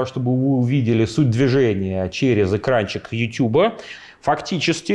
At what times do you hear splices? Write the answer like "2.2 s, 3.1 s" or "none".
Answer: 3.9 s